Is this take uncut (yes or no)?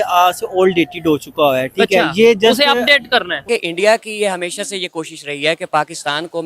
no